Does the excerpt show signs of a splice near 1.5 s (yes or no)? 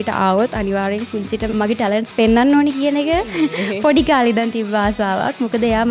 yes